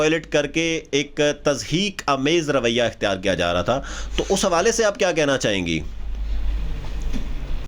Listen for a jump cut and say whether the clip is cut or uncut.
uncut